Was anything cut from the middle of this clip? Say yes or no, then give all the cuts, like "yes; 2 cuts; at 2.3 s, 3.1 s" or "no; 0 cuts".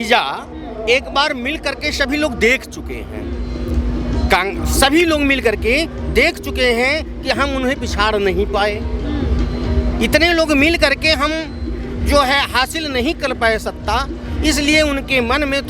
no; 0 cuts